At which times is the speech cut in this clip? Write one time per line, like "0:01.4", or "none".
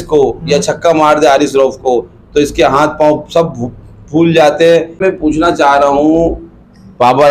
0:05.0